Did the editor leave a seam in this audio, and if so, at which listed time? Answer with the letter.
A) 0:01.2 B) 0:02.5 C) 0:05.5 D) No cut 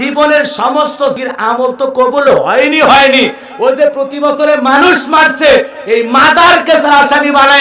A